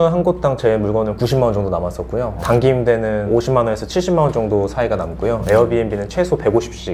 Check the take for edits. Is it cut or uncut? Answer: uncut